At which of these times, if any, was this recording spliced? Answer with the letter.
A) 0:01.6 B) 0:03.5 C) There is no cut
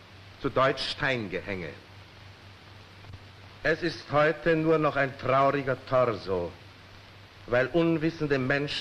C